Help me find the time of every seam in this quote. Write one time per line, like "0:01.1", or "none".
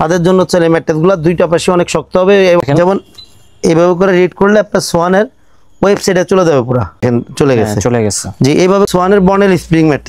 0:02.6
0:07.0
0:08.9